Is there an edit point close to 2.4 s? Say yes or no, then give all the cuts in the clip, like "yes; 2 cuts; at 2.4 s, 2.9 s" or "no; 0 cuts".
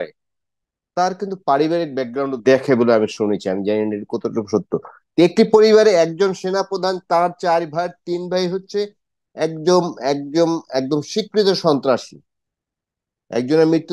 yes; 1 cut; at 2.4 s